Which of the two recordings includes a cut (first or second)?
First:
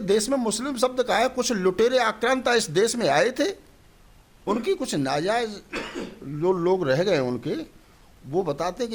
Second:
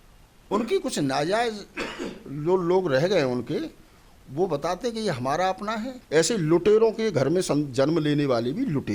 second